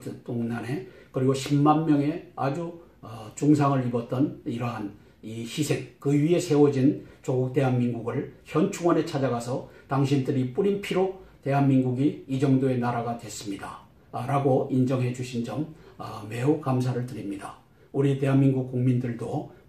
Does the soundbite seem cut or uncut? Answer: uncut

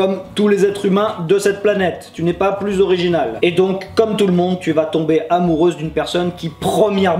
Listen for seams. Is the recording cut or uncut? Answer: uncut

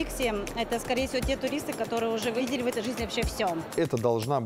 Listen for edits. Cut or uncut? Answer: cut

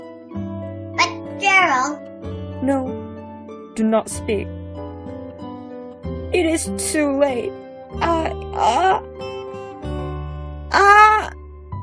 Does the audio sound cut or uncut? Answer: cut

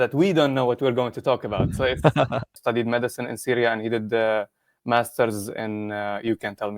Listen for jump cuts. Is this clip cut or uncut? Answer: cut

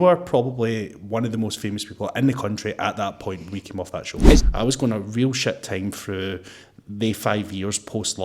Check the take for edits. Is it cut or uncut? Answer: cut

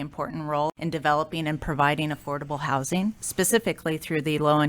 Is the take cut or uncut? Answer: cut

